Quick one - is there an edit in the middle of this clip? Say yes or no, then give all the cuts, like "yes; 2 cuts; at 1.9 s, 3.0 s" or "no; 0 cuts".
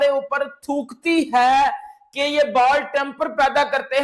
no; 0 cuts